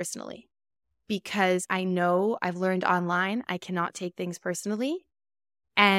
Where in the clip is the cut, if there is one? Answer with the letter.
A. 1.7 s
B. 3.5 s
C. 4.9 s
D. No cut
A